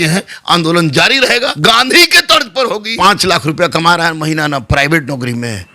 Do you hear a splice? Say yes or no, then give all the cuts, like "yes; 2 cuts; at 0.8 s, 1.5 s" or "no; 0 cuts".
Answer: yes; 2 cuts; at 1.5 s, 2.9 s